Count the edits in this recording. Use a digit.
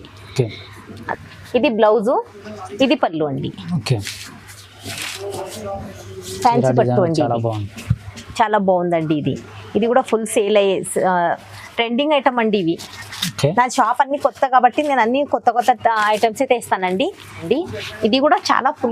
2